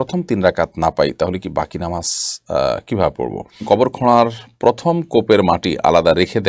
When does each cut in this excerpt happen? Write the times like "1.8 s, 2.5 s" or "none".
3.6 s